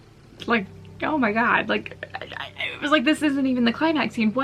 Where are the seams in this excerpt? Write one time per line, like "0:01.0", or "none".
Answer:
none